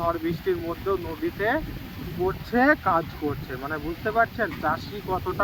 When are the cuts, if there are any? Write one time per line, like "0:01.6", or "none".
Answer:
none